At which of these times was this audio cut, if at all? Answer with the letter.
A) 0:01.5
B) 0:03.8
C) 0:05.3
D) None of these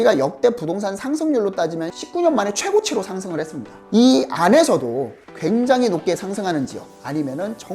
B